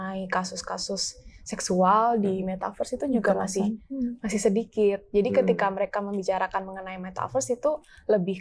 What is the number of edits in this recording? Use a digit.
0